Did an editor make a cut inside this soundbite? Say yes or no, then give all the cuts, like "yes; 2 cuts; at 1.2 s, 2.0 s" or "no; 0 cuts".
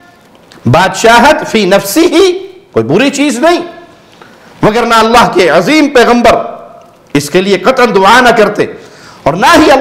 no; 0 cuts